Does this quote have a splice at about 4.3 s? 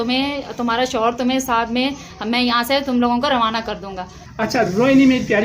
yes; 1 cut; at 4.3 s

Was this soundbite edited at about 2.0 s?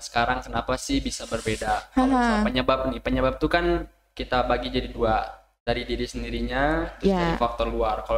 no; 0 cuts

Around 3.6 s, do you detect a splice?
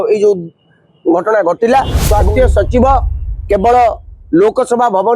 no; 1 cut; at 2.0 s

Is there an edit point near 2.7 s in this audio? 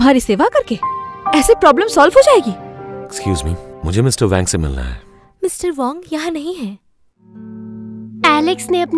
yes; 2 cuts; at 2.7 s, 7.5 s

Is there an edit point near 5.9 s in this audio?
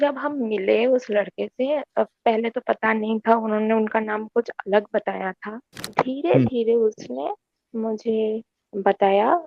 yes; 1 cut; at 5.9 s

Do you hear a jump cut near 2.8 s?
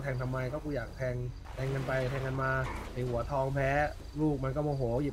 yes; 3 cuts; at 1.4 s, 2.8 s, 4.0 s

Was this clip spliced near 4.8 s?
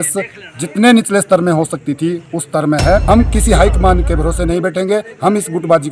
no; 1 cut; at 3.0 s

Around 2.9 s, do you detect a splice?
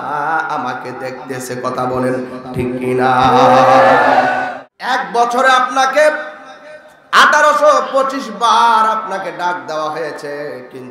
no; 1 cut; at 4.5 s

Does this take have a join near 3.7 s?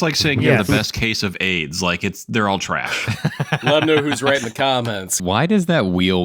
yes; 2 cuts; at 3.7 s, 5.2 s

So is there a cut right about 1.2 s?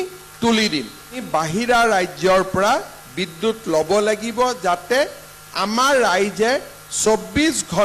yes; 1 cut; at 1.2 s

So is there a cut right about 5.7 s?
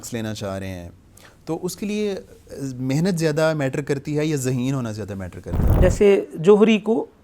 yes; 1 cut; at 5.7 s

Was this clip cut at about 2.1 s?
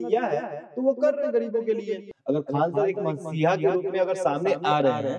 yes; 1 cut; at 2.1 s

